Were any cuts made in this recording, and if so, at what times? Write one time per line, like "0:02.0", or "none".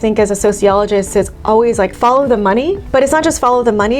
0:01.9
0:02.8